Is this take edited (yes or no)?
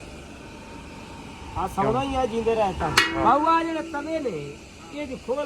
yes